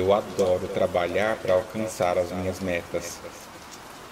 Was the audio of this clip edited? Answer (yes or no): no